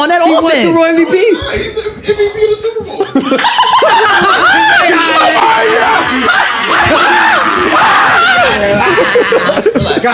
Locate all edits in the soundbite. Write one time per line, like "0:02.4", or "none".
none